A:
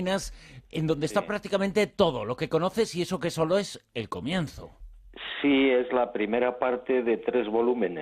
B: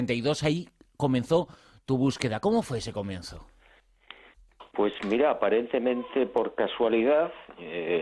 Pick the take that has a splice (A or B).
A